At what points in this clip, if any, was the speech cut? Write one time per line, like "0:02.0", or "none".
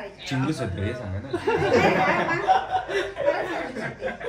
none